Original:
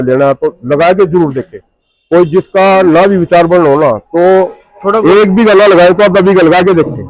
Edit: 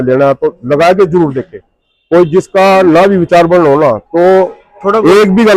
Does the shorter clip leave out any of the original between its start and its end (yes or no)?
no